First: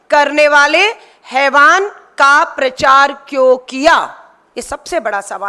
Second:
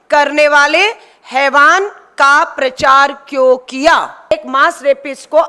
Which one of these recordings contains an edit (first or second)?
second